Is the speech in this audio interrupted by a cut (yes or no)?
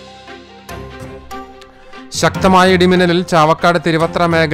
yes